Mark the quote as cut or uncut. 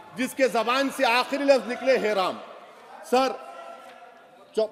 uncut